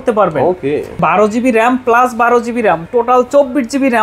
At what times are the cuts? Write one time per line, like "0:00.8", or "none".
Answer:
0:01.0